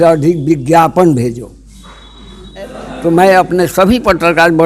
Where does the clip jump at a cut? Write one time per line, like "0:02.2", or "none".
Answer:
0:02.8

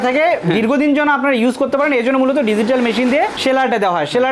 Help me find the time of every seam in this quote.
none

